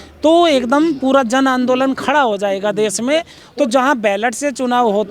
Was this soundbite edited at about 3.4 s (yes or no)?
yes